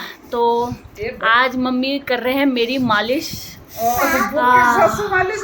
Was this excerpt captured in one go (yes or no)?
yes